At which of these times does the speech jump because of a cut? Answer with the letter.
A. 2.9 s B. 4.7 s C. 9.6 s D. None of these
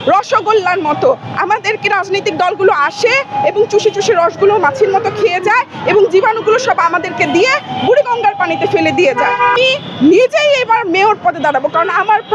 C